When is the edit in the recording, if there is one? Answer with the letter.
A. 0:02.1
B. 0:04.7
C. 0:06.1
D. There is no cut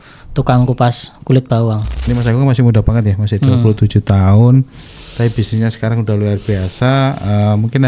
A